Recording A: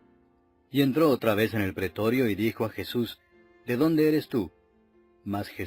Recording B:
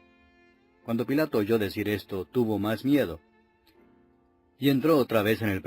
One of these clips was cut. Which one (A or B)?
B